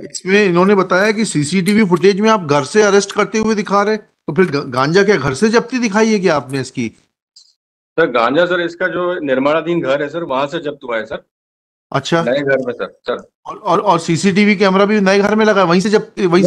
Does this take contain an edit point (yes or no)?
yes